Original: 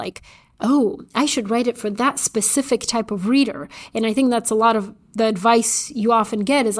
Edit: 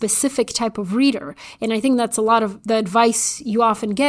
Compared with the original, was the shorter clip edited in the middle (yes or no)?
yes